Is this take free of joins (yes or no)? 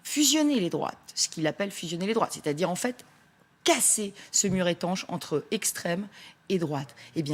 yes